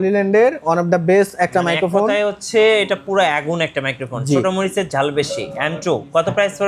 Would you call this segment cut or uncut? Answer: uncut